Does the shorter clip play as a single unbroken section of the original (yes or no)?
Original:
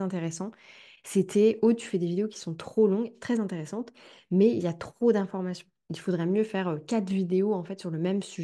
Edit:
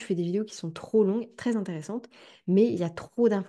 yes